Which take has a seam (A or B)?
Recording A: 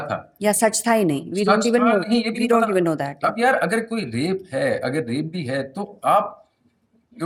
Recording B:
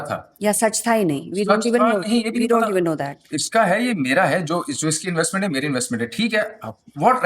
B